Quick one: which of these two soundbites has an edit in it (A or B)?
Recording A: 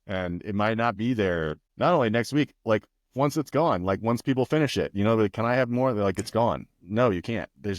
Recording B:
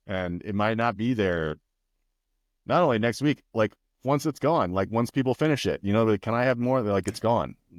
A